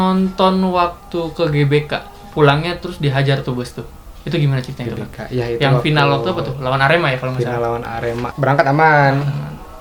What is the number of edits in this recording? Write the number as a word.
one